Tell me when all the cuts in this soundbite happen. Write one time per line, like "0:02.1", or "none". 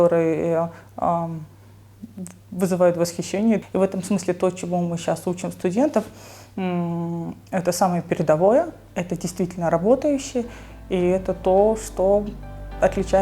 0:03.6